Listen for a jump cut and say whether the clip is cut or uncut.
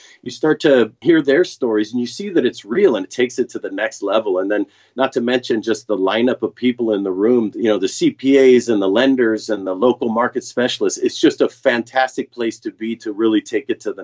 uncut